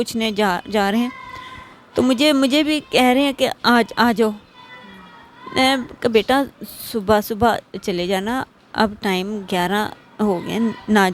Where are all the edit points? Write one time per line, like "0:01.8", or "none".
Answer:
none